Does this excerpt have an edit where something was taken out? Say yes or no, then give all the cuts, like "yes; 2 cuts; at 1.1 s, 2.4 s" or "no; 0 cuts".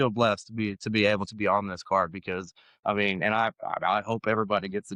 no; 0 cuts